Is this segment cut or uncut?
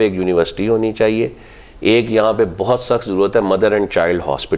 uncut